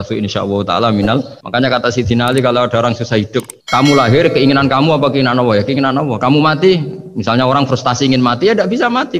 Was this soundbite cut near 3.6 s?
yes; 2 cuts; at 1.4 s, 3.6 s

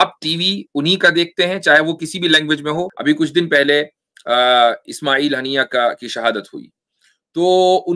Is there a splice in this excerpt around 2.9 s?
yes; 1 cut; at 2.9 s

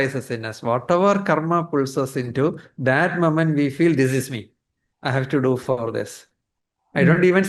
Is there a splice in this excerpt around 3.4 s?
no; 0 cuts

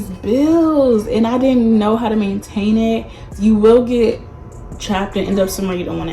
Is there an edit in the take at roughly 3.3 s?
yes; 1 cut; at 3.3 s

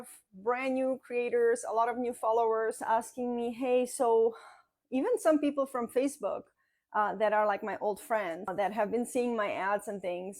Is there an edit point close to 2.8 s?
yes; 2 cuts; at 2.8 s, 8.5 s

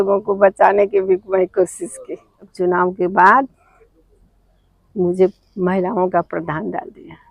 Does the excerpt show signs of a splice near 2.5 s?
yes; 1 cut; at 2.5 s

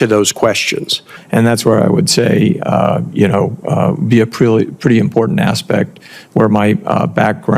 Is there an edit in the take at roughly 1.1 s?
yes; 1 cut; at 1.1 s

